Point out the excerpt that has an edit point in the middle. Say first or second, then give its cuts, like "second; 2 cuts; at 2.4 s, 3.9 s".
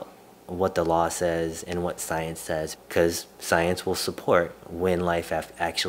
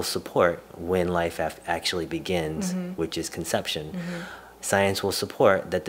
first; 1 cut; at 2.8 s